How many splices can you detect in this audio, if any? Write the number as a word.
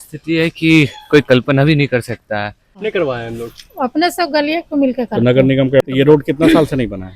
two